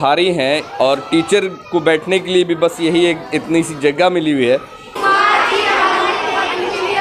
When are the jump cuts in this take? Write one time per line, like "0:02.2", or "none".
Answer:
0:05.0